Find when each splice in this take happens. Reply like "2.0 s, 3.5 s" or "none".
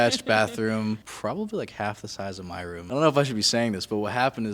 1.1 s, 2.8 s